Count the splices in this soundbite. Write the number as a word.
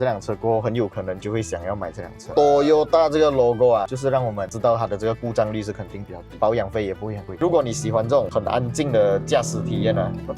two